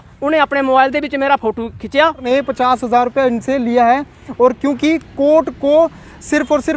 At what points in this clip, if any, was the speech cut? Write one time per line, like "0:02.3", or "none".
0:02.2